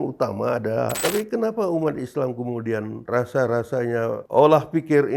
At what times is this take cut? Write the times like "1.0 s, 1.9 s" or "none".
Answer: 1.0 s